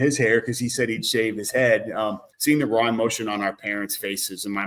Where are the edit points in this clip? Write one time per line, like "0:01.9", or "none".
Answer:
0:02.3